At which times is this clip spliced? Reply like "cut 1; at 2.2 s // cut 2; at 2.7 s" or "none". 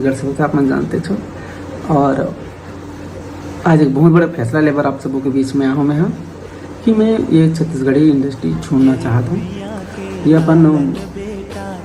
cut 1; at 10.9 s